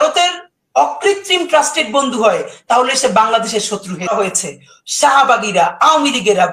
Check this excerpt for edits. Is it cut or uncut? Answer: cut